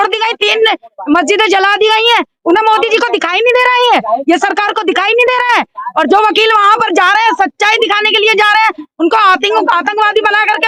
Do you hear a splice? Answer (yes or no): no